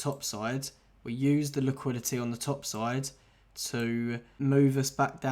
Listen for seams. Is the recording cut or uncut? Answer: cut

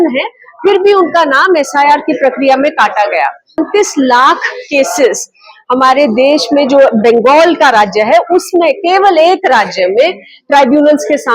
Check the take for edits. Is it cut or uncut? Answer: cut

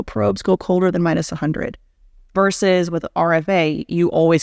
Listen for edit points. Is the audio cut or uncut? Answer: cut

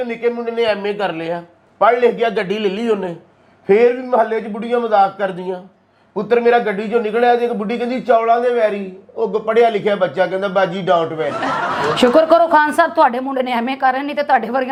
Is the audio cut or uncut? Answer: uncut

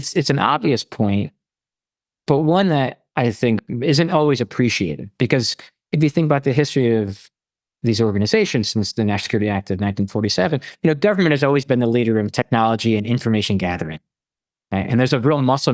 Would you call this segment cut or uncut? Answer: uncut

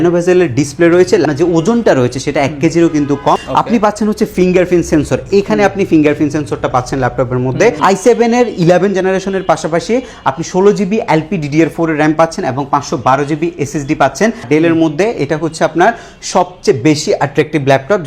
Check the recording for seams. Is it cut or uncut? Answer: cut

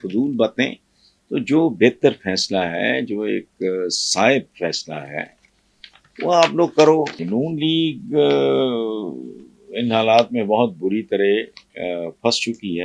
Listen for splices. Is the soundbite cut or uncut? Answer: cut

